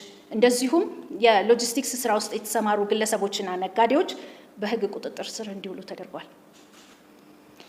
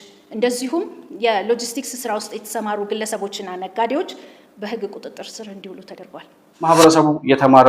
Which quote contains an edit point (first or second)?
second